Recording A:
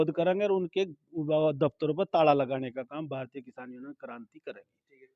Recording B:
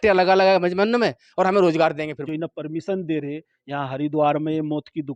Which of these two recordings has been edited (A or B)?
B